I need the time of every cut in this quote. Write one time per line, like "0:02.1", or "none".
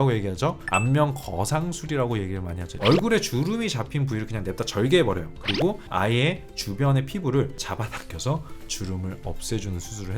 0:02.7